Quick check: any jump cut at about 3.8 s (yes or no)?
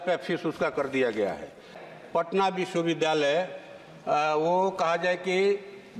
no